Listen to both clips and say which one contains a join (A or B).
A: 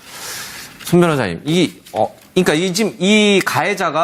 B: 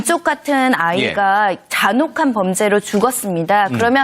B